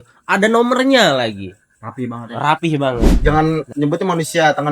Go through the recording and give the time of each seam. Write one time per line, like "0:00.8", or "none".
0:03.1